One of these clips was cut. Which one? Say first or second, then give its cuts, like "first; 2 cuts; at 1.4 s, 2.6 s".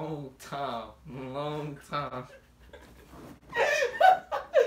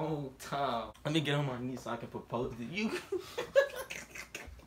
second; 1 cut; at 0.9 s